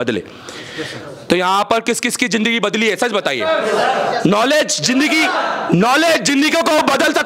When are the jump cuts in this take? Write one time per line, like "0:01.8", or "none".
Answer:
none